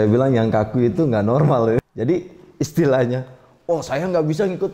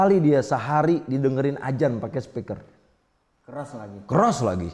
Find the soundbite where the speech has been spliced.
first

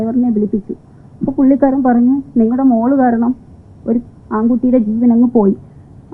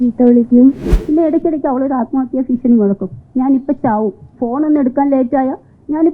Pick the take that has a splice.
second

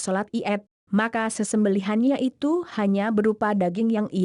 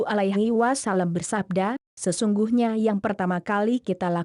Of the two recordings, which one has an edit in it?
second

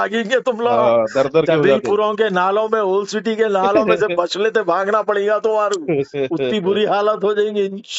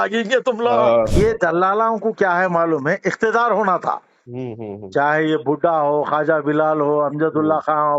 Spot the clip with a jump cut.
second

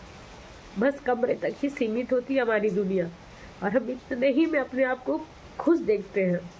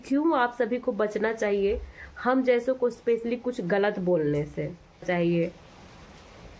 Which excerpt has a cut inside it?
second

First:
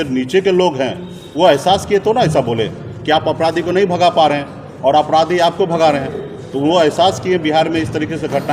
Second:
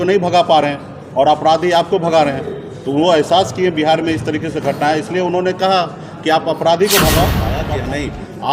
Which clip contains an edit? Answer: second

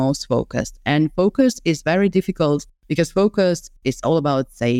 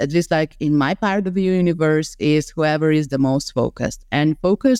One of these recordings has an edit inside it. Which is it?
first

